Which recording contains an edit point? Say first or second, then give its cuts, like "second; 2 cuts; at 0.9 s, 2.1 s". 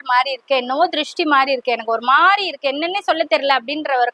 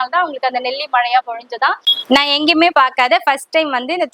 second; 1 cut; at 1.9 s